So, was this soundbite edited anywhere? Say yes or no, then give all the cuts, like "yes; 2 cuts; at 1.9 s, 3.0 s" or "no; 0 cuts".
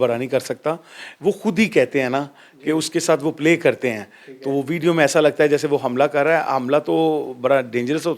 no; 0 cuts